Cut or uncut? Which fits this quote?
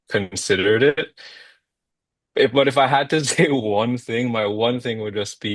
uncut